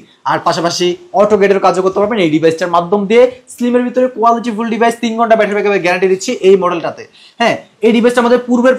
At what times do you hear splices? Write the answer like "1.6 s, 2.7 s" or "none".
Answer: none